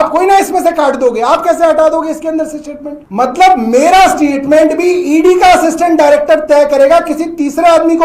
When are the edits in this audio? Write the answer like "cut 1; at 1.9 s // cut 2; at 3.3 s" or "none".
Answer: cut 1; at 3.0 s